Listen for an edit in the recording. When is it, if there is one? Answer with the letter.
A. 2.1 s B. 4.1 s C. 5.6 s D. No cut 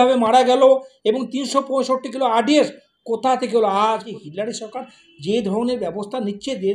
B